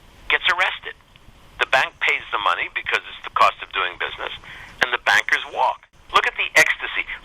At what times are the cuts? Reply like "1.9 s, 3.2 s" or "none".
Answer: 5.9 s